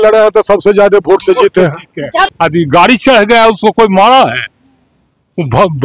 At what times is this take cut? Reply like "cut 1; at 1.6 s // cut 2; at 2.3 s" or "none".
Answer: cut 1; at 2.3 s